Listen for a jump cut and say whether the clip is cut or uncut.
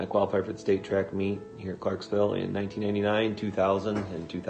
uncut